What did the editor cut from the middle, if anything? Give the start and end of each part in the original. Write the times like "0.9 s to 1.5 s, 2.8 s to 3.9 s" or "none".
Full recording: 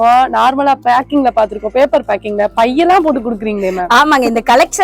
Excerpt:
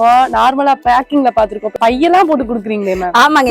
1.7 s to 2.5 s